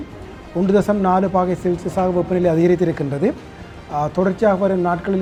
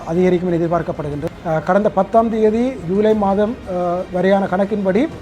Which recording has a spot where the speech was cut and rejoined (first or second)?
second